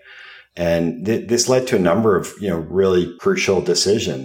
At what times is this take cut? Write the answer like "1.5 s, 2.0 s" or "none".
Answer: 3.1 s